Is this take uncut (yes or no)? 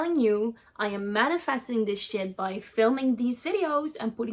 yes